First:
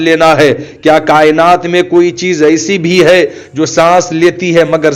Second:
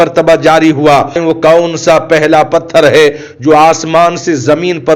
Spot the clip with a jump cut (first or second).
second